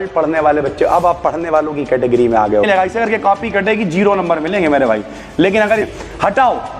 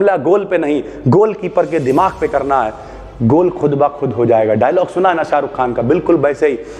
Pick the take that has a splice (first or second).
first